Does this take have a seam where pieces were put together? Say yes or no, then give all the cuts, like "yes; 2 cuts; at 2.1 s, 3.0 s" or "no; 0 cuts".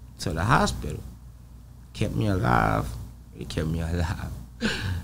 no; 0 cuts